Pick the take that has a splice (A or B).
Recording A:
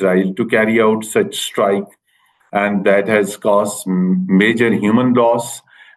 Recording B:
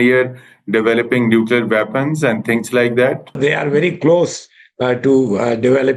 B